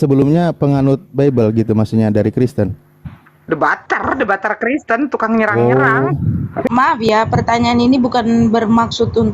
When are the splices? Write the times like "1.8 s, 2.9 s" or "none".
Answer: 6.6 s